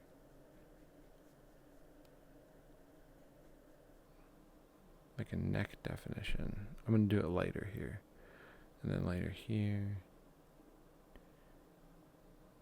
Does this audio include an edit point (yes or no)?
yes